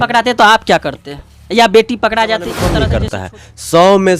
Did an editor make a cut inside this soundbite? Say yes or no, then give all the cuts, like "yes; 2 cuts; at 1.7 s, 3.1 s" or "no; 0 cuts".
yes; 1 cut; at 2.7 s